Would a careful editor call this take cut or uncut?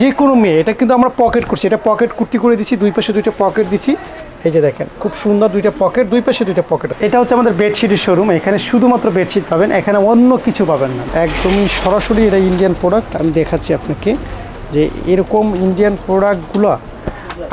cut